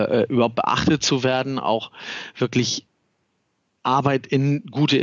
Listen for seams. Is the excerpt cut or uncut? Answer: uncut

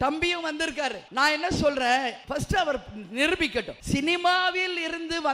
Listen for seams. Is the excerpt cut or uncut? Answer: cut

